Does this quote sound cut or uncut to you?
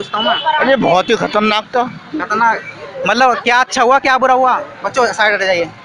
uncut